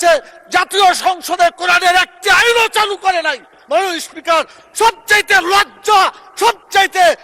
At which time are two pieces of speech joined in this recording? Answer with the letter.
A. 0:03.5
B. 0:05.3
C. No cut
C